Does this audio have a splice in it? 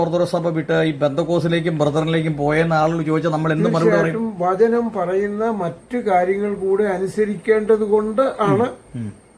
no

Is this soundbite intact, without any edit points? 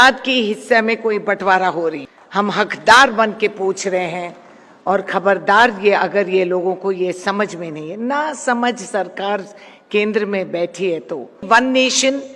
no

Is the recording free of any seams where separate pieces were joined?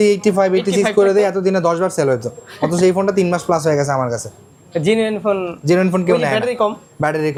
yes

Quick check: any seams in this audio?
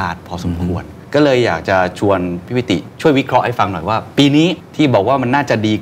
yes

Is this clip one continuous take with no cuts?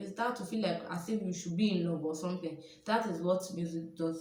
yes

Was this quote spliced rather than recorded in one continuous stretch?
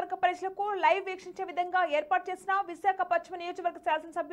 no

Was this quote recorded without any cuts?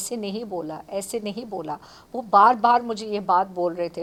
yes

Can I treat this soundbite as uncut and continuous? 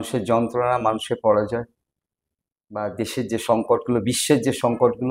yes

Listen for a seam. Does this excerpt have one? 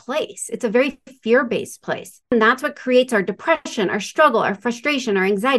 yes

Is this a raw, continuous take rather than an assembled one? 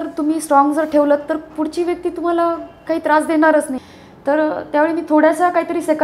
no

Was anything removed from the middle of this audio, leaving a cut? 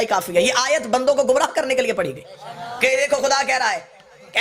no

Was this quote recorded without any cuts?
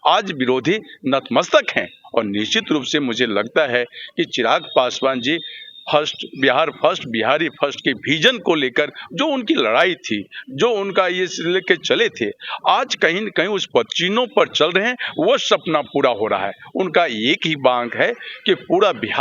yes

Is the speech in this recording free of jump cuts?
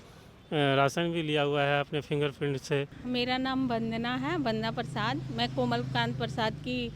no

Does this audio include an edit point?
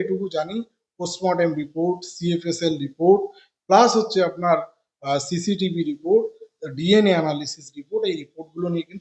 no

